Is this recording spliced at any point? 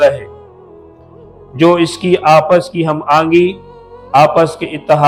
no; 0 cuts

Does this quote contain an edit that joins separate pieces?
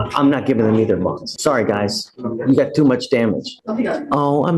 yes; 2 cuts; at 1.3 s, 3.5 s

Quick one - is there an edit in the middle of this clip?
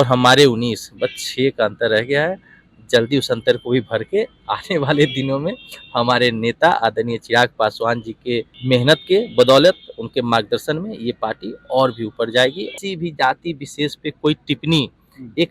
yes; 1 cut; at 12.7 s

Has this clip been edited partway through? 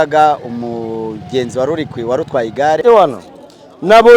yes; 1 cut; at 2.8 s

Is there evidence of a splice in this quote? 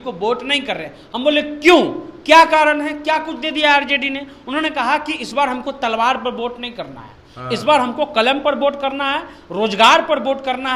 no; 0 cuts

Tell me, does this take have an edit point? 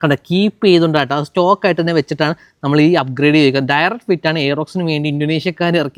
no; 0 cuts

